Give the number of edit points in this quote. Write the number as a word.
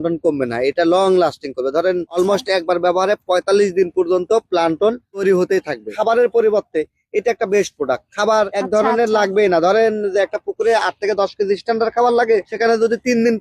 one